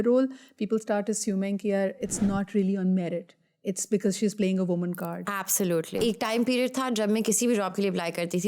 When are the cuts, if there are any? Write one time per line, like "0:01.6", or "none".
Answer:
0:06.0

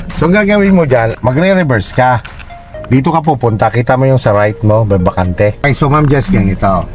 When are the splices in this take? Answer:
0:01.1
0:05.6

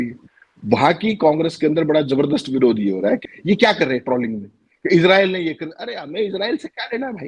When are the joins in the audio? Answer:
0:03.3

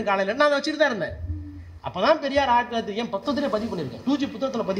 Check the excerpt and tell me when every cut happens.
none

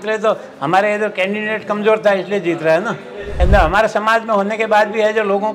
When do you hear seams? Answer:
0:03.3

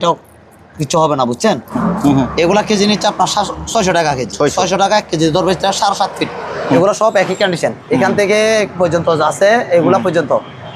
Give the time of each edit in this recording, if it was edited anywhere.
0:01.7
0:06.8

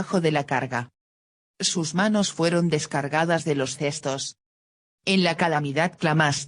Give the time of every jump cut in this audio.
0:00.9

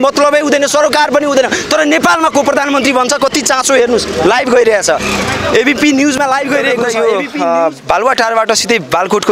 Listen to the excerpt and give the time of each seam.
0:07.0

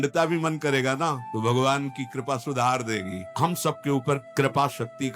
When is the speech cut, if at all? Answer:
0:01.3
0:03.2
0:04.3

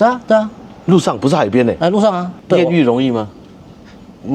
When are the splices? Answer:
0:02.4

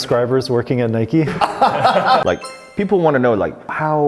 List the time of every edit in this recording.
0:02.2

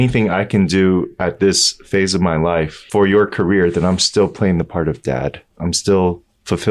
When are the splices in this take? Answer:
0:02.8
0:05.5

